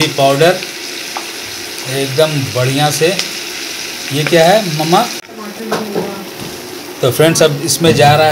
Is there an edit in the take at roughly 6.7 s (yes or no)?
no